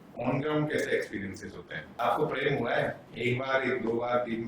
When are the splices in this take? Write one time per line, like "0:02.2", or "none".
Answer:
0:01.9
0:03.1